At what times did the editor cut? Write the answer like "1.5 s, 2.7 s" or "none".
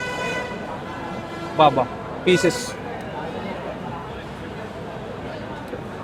none